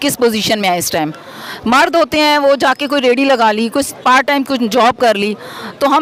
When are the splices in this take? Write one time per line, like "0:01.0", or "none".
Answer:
none